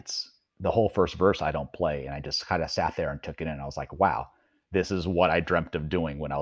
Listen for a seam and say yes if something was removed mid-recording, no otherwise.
no